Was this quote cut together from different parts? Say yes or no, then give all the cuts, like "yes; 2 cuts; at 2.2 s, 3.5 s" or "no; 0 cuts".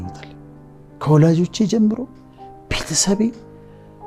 no; 0 cuts